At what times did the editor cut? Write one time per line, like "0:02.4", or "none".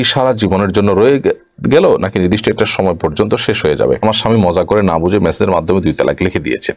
0:04.0